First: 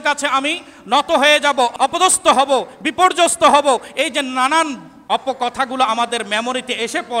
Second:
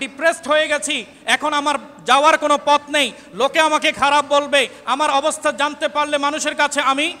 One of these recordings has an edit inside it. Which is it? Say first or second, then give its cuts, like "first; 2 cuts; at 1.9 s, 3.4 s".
first; 2 cuts; at 1.7 s, 4.9 s